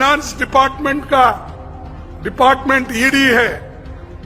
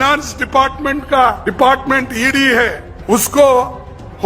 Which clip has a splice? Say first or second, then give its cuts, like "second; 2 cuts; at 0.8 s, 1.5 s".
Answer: second; 2 cuts; at 1.4 s, 2.9 s